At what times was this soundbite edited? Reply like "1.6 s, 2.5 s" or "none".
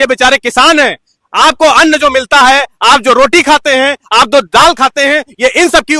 none

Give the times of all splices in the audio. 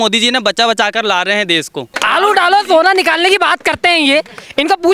1.9 s

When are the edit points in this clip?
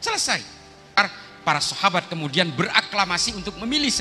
1.0 s

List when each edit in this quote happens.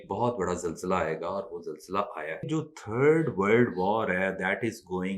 2.5 s

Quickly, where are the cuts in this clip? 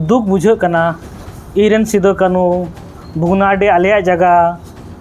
none

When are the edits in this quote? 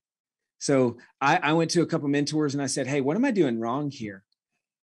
none

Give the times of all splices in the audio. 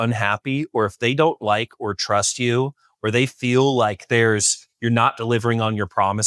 none

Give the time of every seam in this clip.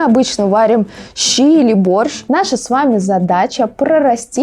2.2 s

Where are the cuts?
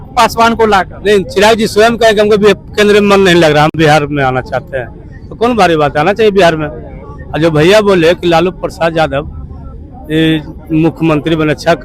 none

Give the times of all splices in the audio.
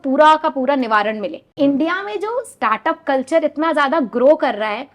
1.4 s

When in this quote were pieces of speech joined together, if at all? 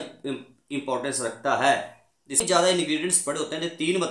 2.4 s

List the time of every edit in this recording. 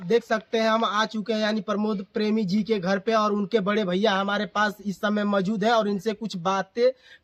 none

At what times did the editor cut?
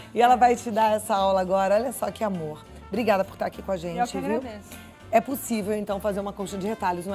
none

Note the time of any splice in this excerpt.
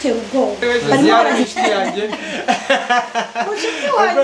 1.3 s

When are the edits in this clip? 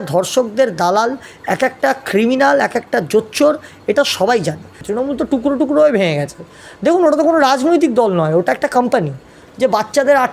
4.8 s, 9.4 s

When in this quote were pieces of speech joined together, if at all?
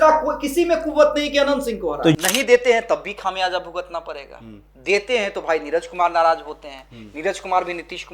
2.2 s

